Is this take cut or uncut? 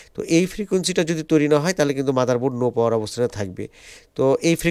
uncut